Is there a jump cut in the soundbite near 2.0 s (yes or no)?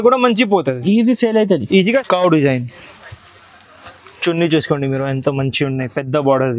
yes